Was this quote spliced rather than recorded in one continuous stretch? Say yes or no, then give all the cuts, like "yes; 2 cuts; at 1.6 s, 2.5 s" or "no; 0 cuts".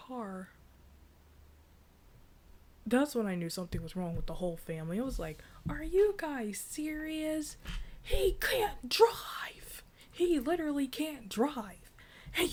no; 0 cuts